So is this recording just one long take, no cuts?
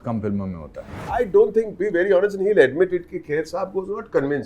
no; 1 cut; at 1.0 s

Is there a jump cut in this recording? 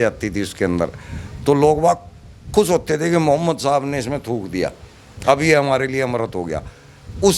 no; 0 cuts

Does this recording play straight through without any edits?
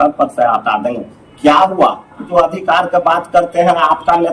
no; 1 cut; at 2.2 s

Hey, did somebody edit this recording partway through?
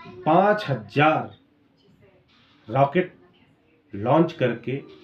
no; 0 cuts

